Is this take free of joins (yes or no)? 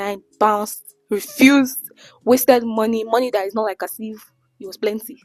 yes